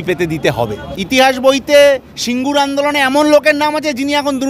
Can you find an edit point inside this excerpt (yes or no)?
yes